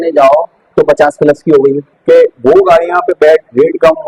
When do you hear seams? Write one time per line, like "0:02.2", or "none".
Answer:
0:02.0

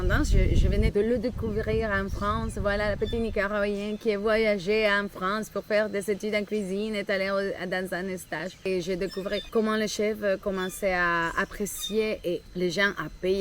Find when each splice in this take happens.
0:00.9
0:08.7
0:12.5

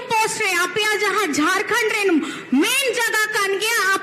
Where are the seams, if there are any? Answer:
none

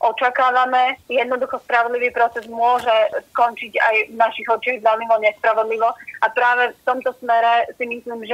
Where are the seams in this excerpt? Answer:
0:01.0

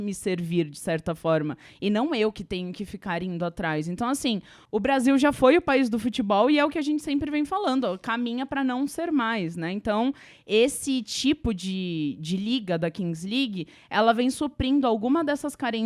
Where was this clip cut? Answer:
none

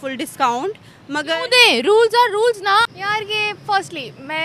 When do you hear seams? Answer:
0:02.9

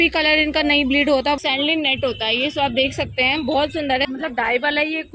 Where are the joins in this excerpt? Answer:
0:01.4
0:04.1

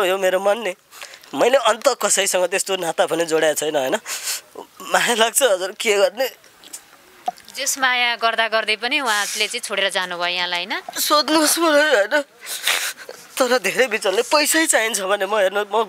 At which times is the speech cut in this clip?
none

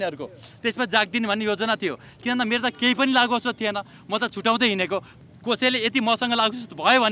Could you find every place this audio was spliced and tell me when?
0:05.1

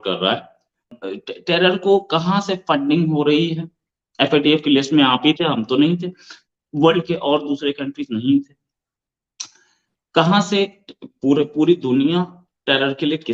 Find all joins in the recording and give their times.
0:00.9

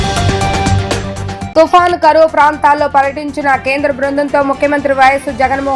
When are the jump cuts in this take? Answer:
0:00.9

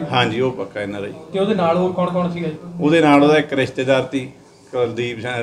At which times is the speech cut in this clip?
none

